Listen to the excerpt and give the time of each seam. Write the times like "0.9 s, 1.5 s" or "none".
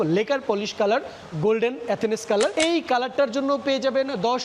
2.5 s